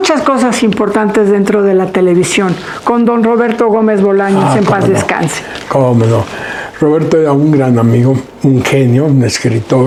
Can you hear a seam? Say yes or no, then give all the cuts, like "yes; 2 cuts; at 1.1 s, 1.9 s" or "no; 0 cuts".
no; 0 cuts